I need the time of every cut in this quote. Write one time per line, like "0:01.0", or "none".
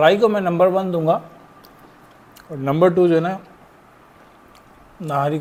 none